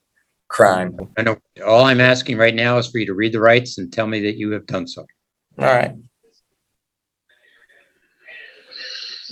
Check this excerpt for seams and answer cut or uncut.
uncut